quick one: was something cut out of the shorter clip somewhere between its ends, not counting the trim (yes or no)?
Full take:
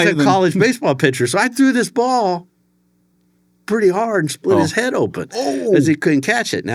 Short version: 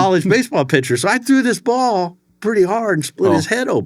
yes